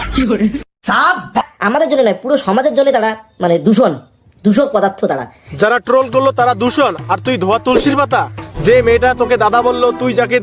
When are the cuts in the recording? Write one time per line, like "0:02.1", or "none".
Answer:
0:01.4